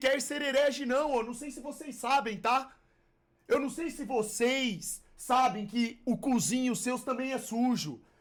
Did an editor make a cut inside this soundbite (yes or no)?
no